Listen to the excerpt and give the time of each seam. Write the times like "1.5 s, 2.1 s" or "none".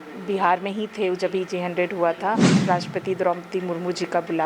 2.6 s